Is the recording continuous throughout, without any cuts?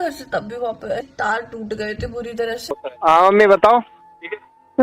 no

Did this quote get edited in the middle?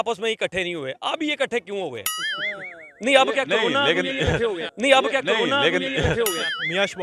yes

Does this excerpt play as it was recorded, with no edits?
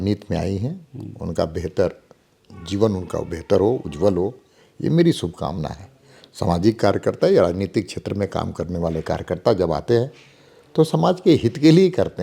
yes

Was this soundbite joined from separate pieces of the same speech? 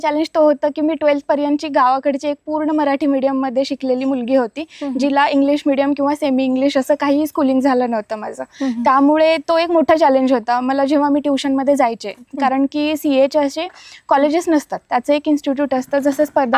no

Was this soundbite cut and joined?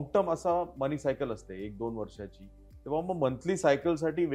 no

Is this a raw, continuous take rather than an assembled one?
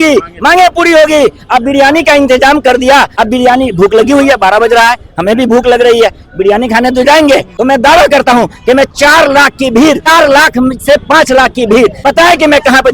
no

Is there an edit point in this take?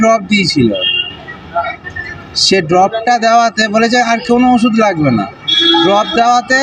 no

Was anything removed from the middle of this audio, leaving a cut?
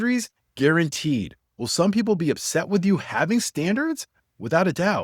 no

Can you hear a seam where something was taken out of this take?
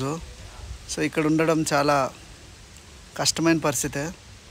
no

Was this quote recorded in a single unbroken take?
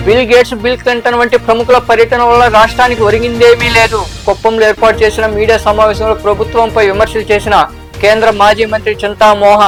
yes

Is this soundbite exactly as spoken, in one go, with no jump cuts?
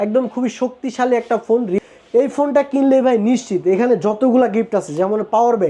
no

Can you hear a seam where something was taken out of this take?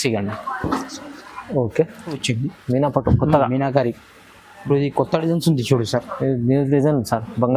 yes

